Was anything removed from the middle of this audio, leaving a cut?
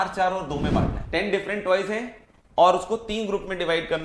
yes; 1 cut; at 1.0 s

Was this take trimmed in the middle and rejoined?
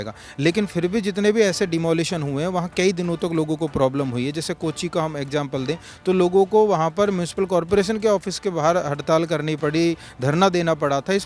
no; 0 cuts

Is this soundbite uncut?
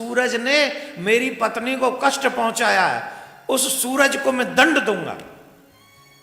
yes; 0 cuts

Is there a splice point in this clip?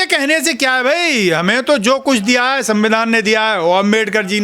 no; 0 cuts

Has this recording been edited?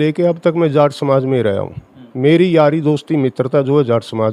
no; 0 cuts

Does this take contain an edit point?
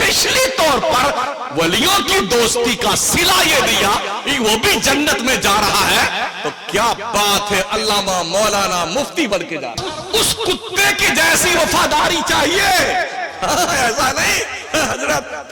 yes; 1 cut; at 9.8 s

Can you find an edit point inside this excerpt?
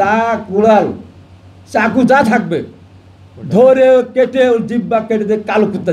no; 0 cuts

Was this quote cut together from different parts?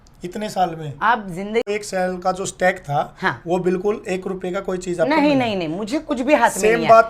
yes; 1 cut; at 1.6 s

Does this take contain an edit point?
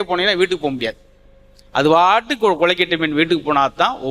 no; 0 cuts

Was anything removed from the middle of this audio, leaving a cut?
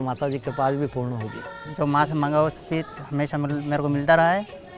yes; 1 cut; at 1.6 s

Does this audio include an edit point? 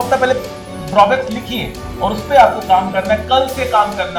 no; 0 cuts

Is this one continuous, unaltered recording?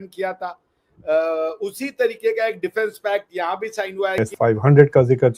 no; 1 cut; at 4.2 s

